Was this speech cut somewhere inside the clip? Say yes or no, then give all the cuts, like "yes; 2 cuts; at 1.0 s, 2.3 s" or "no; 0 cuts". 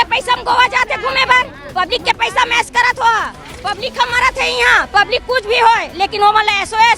no; 0 cuts